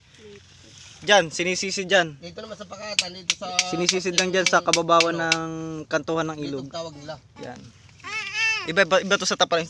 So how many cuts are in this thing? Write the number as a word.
zero